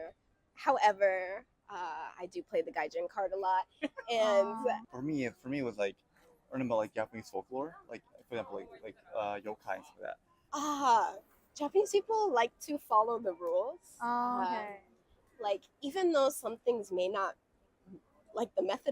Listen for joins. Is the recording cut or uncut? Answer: cut